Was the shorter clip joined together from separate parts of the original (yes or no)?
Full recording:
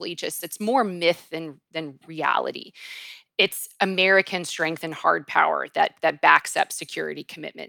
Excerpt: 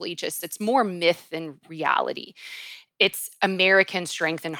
yes